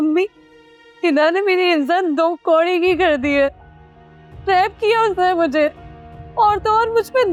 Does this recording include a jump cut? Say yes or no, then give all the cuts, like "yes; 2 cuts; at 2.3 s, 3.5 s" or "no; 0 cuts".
no; 0 cuts